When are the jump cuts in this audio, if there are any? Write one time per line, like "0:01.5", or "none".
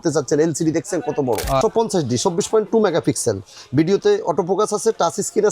0:01.6